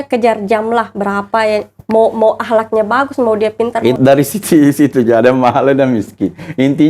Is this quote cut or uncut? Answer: cut